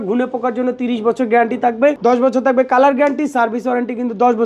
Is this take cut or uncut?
uncut